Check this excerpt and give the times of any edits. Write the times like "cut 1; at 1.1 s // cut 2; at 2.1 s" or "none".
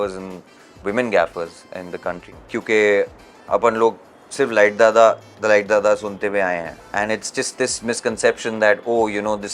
cut 1; at 2.3 s // cut 2; at 6.7 s